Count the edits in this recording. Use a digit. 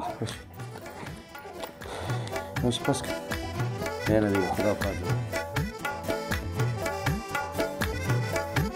1